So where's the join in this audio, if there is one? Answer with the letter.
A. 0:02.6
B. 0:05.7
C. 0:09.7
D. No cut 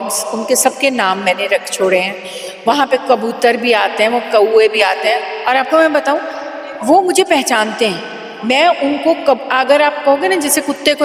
D